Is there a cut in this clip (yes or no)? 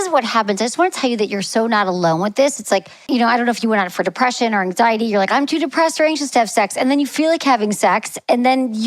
yes